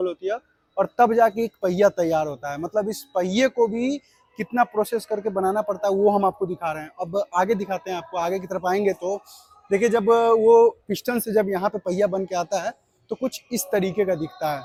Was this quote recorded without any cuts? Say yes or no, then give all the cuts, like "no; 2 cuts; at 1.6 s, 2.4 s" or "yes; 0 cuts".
yes; 0 cuts